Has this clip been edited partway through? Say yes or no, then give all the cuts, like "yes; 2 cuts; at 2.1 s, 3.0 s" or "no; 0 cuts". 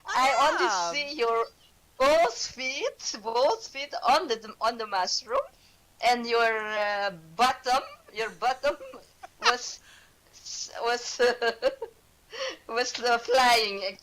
yes; 1 cut; at 8.6 s